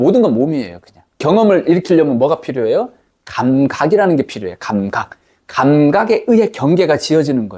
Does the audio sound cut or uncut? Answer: cut